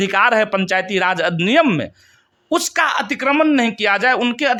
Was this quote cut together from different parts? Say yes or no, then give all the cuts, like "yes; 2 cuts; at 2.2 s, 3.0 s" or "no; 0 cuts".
no; 0 cuts